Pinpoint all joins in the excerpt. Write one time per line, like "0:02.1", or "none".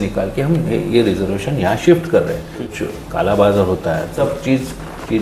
0:02.6
0:04.2